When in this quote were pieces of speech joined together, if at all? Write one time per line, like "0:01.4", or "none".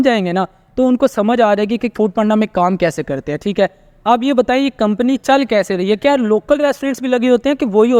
none